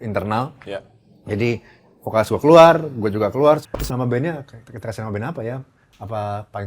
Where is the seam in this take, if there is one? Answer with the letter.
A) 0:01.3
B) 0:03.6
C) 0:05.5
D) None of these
B